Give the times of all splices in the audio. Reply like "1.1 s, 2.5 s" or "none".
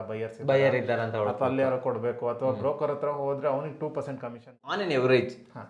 4.6 s